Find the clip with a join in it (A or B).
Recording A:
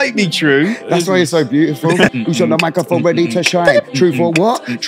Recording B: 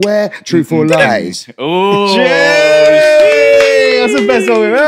A